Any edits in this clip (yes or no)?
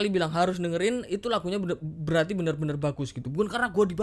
no